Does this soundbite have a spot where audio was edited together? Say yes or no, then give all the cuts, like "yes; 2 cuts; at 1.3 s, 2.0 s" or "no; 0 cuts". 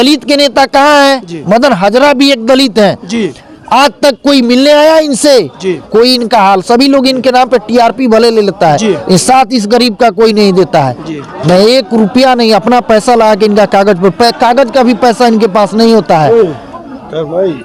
no; 0 cuts